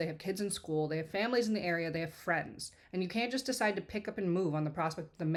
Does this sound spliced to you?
no; 0 cuts

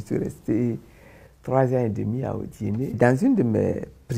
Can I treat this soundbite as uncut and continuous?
no; 1 cut; at 3.0 s

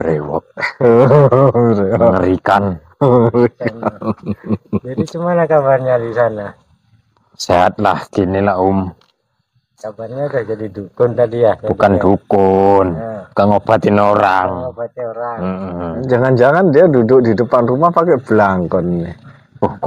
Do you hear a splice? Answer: no; 0 cuts

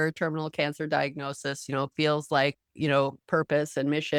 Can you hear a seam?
no; 0 cuts

